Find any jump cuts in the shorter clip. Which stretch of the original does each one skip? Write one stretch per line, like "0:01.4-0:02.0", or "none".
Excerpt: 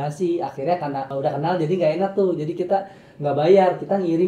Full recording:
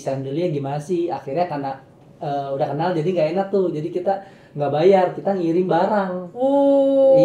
0:01.8-0:02.5